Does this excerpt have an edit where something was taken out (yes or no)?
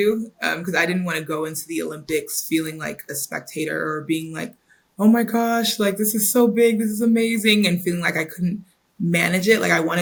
no